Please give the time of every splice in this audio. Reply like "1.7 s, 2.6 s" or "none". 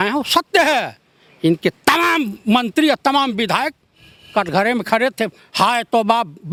none